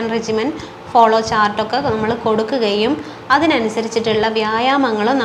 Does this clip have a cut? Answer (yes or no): no